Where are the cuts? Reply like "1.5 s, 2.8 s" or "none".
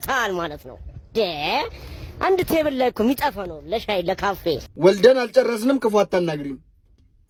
none